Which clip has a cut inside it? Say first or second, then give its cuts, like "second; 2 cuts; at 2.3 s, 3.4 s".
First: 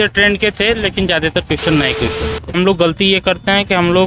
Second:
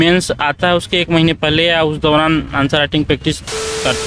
first; 1 cut; at 2.5 s